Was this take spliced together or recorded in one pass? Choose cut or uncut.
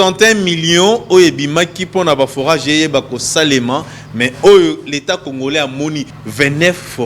cut